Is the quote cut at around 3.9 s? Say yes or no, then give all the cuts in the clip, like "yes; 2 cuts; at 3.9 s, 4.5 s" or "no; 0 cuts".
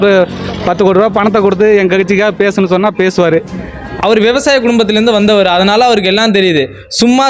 yes; 1 cut; at 3.9 s